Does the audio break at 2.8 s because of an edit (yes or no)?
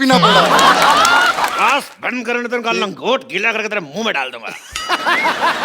no